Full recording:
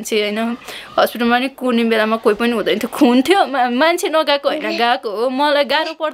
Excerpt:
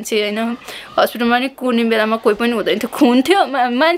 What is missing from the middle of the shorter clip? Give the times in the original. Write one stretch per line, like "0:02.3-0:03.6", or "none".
none